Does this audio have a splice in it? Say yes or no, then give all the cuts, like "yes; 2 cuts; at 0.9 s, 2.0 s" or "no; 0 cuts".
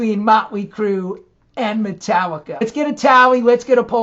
yes; 1 cut; at 2.6 s